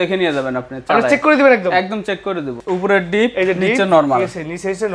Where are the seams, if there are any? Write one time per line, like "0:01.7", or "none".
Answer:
0:02.6